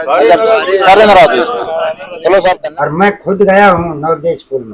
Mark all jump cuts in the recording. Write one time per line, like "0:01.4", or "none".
none